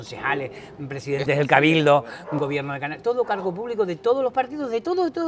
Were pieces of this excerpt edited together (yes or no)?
no